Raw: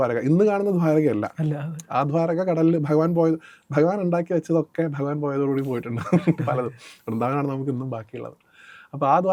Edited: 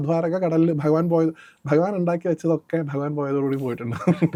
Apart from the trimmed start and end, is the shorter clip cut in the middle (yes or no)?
no